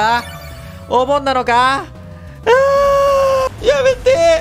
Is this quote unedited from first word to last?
no; 1 cut; at 3.5 s

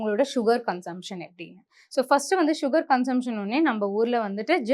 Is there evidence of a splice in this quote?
no; 0 cuts

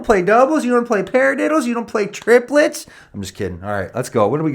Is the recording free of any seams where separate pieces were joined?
yes; 0 cuts

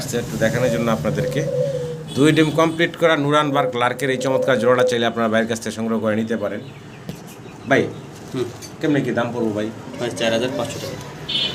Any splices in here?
no; 0 cuts

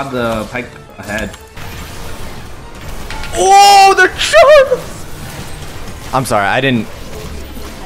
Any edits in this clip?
yes; 1 cut; at 1.5 s

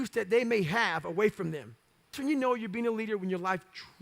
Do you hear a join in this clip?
yes; 1 cut; at 2.2 s

